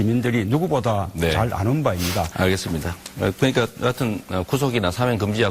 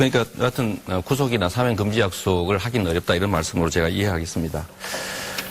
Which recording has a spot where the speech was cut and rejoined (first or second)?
second